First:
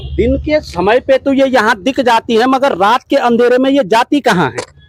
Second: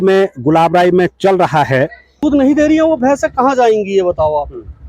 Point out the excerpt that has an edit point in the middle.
second; 1 cut; at 2.2 s

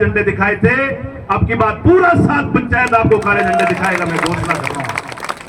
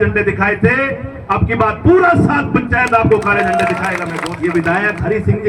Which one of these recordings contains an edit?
second; 1 cut; at 4.3 s

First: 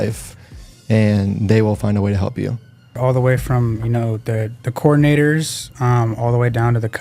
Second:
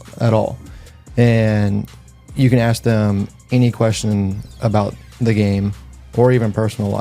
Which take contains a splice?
first; 1 cut; at 3.0 s

